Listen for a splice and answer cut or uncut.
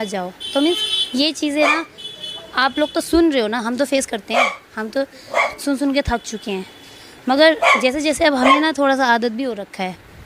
uncut